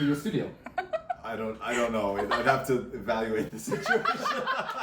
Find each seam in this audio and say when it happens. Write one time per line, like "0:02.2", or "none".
none

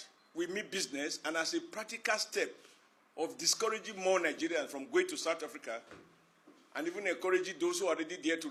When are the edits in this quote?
none

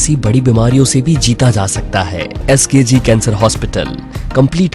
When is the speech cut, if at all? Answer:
0:02.4

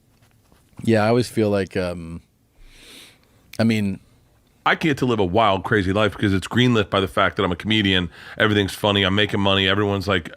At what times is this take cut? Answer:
0:04.6

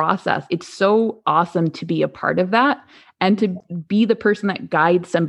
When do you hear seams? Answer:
0:03.6

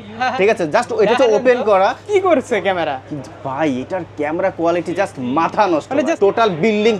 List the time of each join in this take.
0:02.0
0:06.1

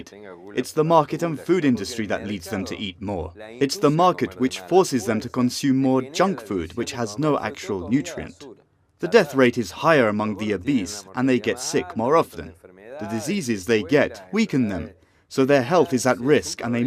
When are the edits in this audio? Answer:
none

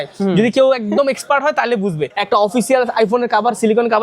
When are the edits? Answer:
0:02.1

